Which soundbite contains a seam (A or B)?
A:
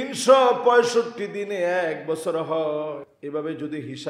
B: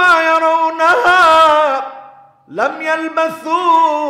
A